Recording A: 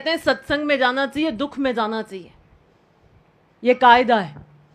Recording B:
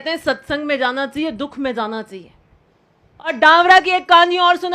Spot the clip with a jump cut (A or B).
B